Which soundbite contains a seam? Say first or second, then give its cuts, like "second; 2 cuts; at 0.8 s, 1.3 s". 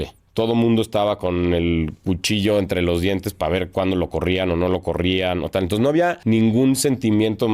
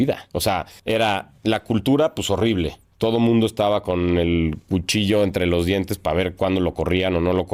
first; 1 cut; at 6.2 s